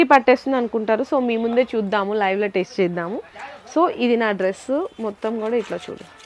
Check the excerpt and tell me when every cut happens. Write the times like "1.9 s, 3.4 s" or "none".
none